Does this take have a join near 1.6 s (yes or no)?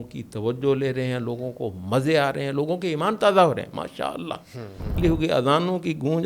no